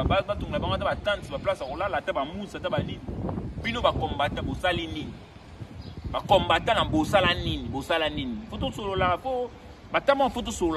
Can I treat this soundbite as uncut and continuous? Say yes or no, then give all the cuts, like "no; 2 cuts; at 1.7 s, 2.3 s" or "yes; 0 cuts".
yes; 0 cuts